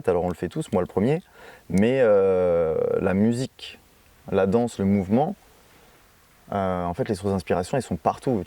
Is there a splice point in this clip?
no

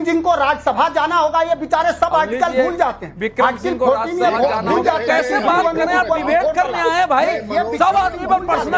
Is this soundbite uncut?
yes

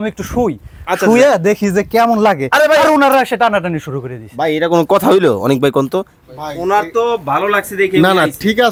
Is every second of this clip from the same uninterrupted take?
yes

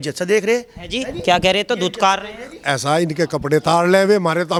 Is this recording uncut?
yes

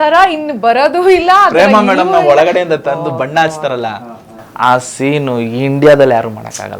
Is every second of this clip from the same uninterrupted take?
yes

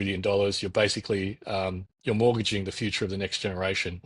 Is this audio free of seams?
yes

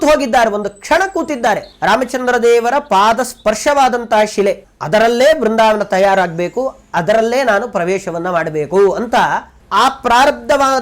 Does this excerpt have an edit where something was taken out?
yes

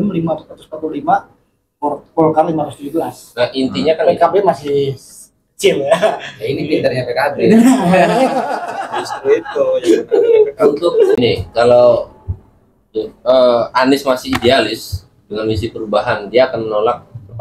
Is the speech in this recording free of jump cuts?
no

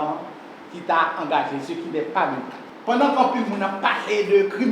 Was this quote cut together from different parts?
yes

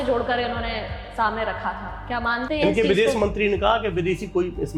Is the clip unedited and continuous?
yes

